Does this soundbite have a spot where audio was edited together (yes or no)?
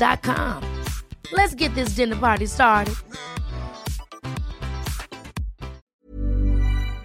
yes